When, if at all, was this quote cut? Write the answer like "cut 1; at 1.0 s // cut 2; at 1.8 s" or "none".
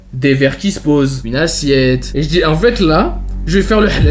cut 1; at 1.2 s